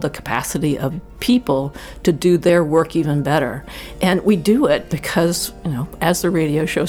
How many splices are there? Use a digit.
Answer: 1